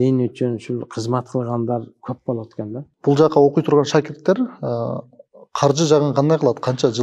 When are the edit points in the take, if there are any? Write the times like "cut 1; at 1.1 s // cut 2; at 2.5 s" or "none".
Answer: cut 1; at 2.9 s